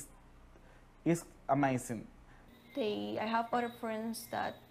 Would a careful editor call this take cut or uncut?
cut